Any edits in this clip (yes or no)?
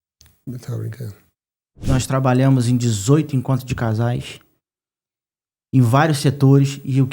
yes